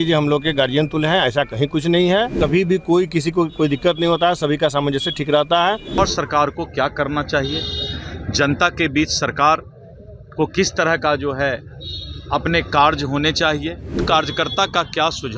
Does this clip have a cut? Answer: yes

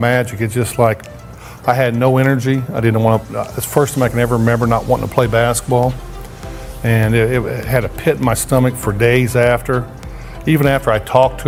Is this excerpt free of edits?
yes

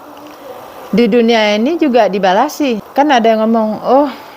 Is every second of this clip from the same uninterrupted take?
no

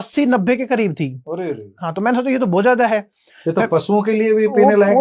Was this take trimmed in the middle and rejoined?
no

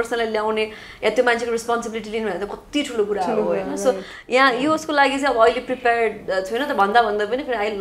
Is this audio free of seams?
yes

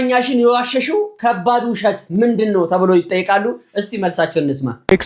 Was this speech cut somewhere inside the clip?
no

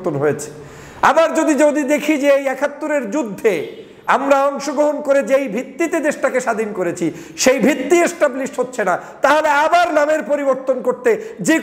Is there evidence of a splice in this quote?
no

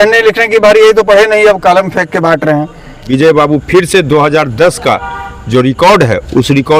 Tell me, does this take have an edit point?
yes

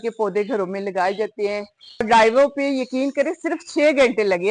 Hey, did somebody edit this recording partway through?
yes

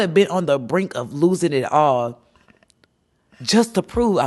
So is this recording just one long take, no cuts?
yes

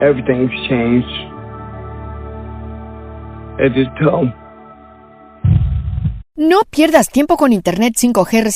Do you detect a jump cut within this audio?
yes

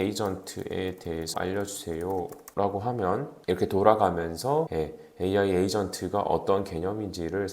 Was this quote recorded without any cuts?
no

